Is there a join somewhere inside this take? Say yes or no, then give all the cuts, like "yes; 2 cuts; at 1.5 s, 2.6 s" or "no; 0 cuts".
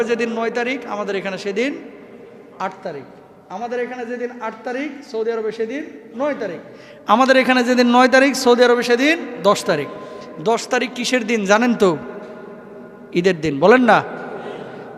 no; 0 cuts